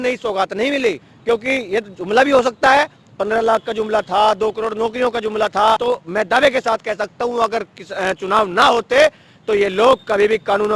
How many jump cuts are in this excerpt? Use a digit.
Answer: 2